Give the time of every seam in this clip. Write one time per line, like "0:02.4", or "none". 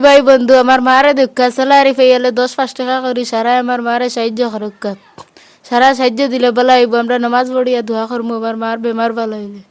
none